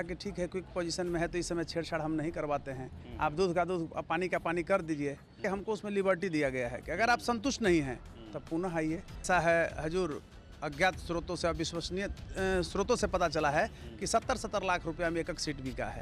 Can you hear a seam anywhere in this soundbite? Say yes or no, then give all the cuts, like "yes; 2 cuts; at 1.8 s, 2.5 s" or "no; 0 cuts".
yes; 2 cuts; at 5.4 s, 9.2 s